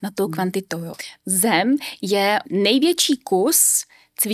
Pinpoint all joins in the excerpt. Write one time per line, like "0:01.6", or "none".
0:00.9
0:02.4